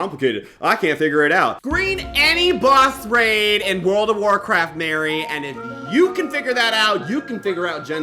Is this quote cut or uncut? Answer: cut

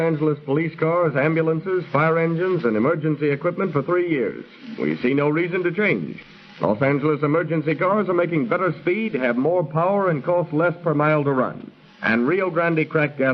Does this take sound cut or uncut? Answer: cut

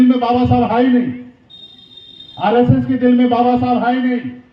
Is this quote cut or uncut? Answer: uncut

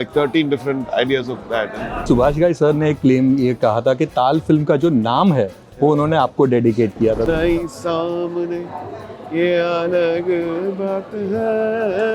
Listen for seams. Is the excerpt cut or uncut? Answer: cut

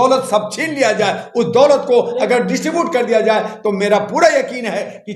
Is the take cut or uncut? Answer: uncut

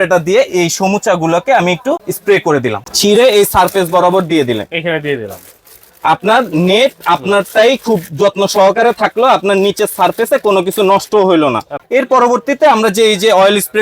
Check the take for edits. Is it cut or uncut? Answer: cut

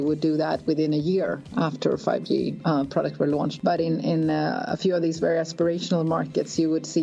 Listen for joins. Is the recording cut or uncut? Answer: cut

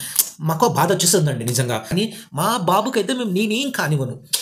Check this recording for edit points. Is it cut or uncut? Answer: cut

